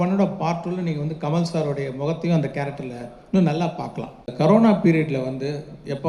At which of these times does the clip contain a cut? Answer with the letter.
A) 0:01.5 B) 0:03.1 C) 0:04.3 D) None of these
C